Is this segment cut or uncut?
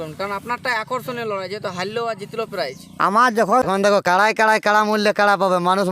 cut